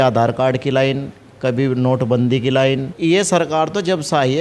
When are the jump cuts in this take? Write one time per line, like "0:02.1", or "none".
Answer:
0:02.9

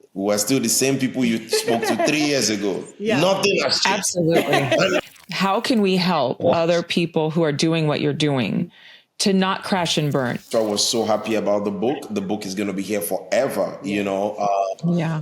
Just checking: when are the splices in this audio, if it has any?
0:05.0
0:10.5

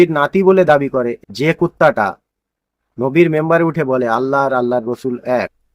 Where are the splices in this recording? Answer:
0:01.2

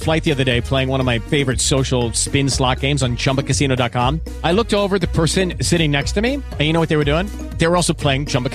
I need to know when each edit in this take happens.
none

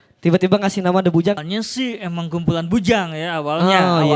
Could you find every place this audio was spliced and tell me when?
0:01.4

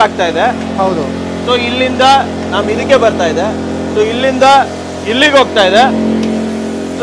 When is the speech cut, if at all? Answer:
none

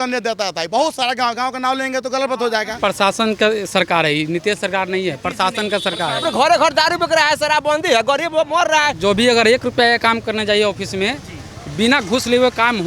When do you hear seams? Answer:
0:02.7
0:06.2
0:09.0

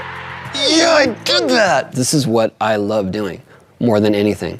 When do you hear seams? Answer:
0:01.9

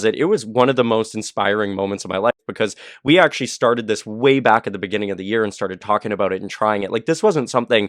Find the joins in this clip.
none

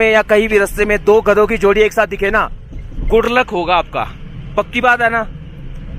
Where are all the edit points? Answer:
none

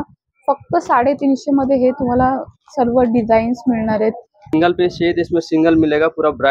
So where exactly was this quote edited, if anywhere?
0:04.5

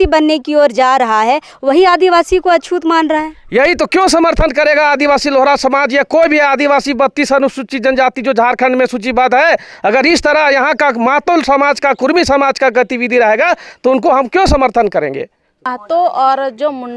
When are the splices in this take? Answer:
0:15.7

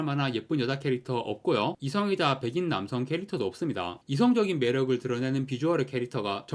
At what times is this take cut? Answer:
0:04.0

